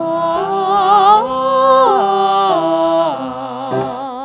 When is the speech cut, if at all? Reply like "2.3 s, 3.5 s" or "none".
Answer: none